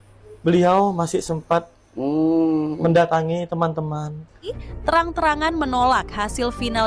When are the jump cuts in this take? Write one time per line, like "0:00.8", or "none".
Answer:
0:04.6